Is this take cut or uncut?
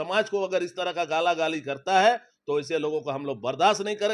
uncut